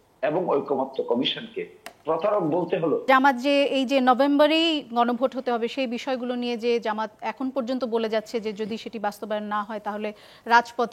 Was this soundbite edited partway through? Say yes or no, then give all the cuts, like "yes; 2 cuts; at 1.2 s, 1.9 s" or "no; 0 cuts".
yes; 1 cut; at 3.1 s